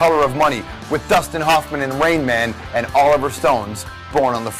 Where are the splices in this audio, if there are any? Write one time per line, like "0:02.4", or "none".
0:02.9